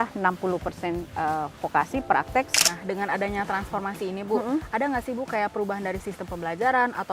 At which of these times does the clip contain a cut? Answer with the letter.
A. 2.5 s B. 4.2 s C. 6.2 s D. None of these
A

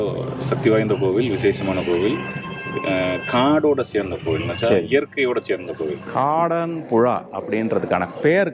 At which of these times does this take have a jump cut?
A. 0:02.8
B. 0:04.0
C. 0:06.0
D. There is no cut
C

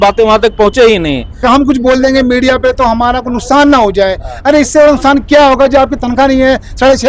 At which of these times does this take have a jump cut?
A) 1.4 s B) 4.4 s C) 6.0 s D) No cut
A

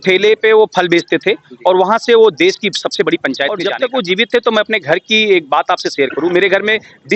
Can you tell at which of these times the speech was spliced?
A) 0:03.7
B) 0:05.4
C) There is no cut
A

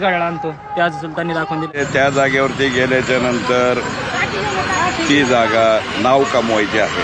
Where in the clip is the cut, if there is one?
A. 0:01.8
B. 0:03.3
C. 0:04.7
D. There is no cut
A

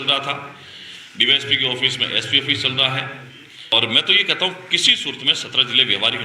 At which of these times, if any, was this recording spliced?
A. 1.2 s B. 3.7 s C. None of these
B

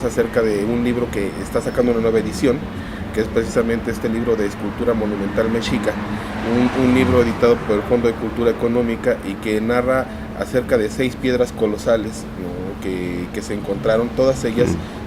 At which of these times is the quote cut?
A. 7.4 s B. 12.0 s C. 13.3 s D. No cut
D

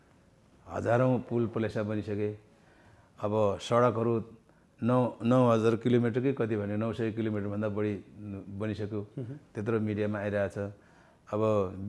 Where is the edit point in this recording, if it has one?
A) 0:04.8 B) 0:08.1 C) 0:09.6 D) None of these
D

